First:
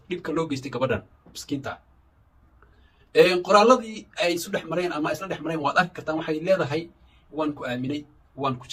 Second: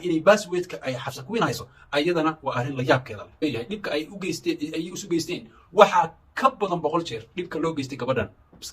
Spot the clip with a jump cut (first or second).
second